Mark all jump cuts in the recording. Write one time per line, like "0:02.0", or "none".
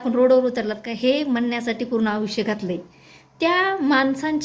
none